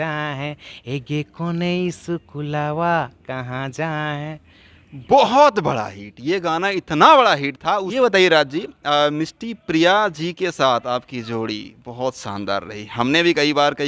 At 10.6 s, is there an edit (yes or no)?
no